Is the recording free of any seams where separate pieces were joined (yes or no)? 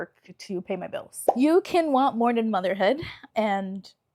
no